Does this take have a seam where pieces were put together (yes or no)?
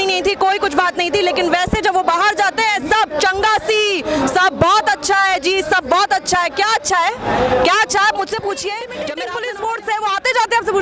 yes